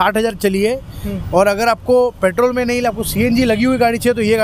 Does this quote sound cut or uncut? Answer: uncut